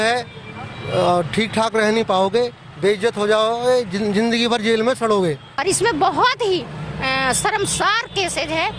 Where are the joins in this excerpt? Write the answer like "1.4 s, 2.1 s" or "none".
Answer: 5.5 s